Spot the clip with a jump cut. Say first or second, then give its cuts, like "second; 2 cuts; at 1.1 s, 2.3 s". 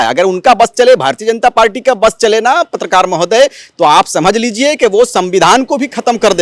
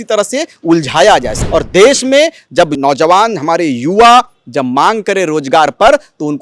second; 2 cuts; at 1.4 s, 2.8 s